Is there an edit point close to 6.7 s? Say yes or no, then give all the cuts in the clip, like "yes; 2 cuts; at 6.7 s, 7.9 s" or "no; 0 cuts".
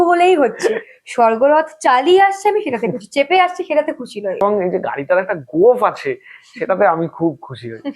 no; 1 cut; at 4.4 s